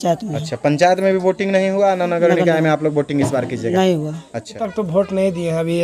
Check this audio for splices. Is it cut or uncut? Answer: cut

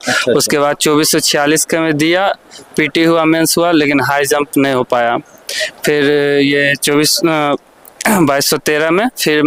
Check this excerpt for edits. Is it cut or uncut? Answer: uncut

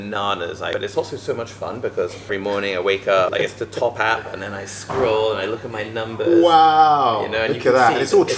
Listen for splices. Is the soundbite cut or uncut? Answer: cut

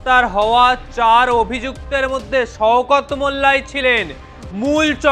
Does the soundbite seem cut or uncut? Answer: uncut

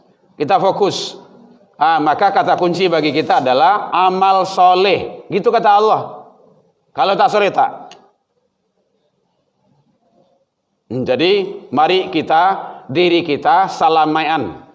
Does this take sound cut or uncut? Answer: uncut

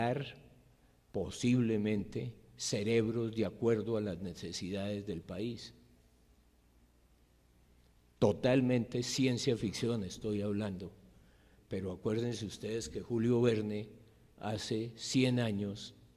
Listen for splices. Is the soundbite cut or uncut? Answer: uncut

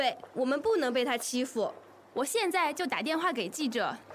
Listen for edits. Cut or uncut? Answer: uncut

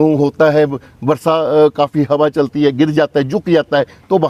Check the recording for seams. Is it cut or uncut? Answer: uncut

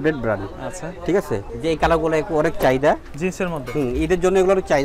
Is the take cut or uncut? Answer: cut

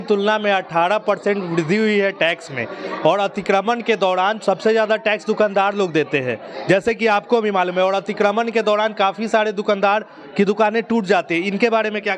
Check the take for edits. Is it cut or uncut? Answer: uncut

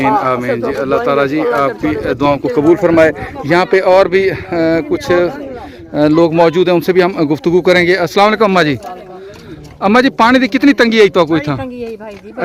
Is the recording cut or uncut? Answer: uncut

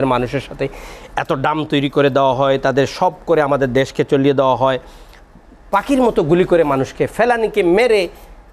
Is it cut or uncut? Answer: uncut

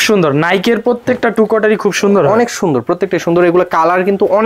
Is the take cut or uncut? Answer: uncut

